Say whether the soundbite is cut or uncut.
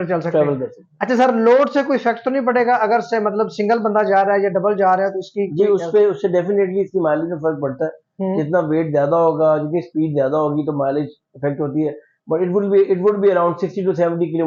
uncut